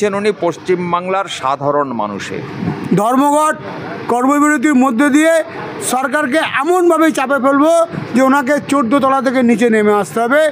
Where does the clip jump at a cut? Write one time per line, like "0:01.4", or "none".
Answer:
0:02.5